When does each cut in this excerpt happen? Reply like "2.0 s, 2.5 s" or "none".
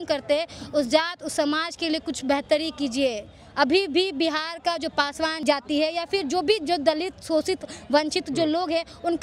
5.4 s